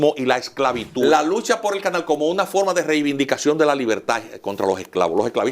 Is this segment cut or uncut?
cut